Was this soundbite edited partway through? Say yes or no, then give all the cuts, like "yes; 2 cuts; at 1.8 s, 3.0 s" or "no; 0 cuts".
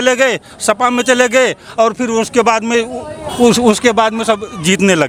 no; 0 cuts